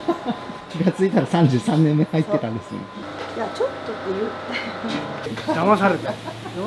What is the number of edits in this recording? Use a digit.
1